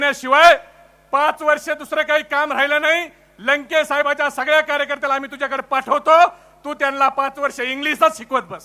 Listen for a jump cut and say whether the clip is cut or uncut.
uncut